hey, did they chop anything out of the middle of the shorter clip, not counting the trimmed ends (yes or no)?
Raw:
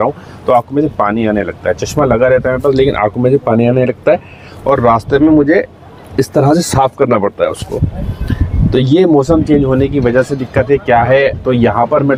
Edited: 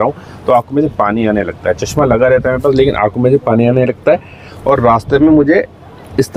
no